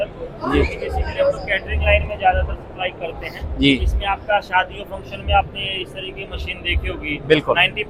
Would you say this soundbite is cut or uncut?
uncut